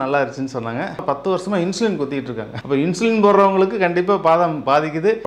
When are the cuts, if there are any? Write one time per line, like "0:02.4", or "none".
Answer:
0:01.0